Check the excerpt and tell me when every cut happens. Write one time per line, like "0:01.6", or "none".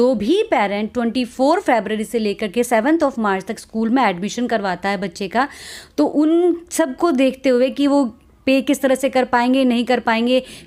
none